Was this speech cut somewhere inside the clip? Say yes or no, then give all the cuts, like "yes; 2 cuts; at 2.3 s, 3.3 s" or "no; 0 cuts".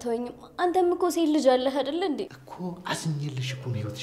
yes; 1 cut; at 2.4 s